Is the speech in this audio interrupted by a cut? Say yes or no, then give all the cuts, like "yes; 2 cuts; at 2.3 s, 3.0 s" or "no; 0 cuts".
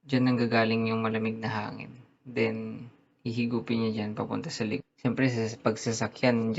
yes; 1 cut; at 4.8 s